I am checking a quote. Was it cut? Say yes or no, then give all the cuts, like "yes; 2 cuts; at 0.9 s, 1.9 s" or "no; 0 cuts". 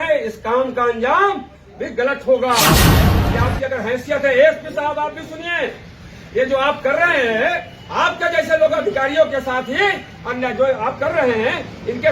yes; 1 cut; at 3.1 s